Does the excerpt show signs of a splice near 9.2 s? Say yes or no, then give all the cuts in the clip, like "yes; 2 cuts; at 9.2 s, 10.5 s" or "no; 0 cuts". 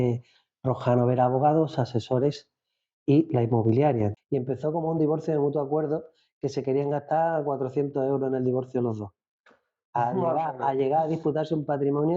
no; 1 cut; at 4.2 s